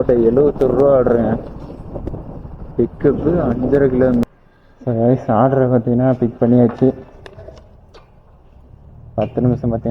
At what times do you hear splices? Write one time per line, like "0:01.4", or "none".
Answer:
0:04.2